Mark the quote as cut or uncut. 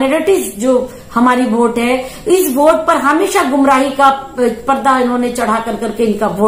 uncut